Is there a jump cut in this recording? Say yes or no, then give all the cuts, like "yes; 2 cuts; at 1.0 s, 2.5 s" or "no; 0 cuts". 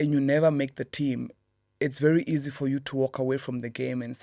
no; 0 cuts